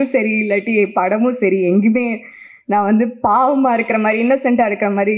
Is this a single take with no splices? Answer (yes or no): yes